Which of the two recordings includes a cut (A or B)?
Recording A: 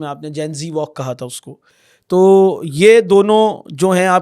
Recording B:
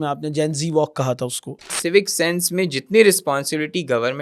B